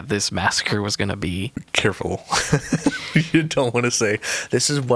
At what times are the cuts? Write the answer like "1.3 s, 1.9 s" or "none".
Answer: 1.6 s